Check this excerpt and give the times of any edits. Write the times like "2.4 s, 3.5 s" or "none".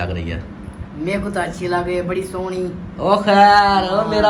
none